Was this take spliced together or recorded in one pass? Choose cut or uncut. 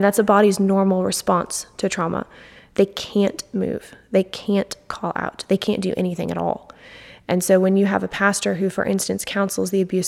uncut